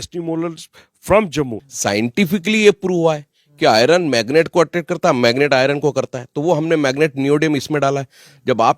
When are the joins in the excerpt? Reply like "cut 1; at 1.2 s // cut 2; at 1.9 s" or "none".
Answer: cut 1; at 1.6 s